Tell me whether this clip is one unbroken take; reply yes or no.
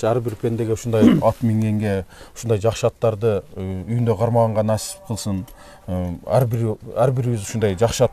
yes